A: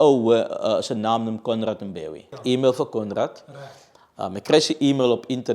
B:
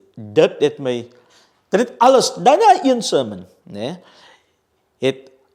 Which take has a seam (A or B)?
A